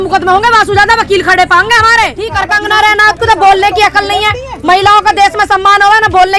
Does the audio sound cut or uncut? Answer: cut